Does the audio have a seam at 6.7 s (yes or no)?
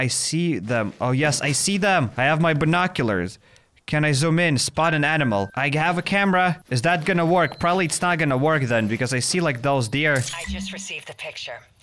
yes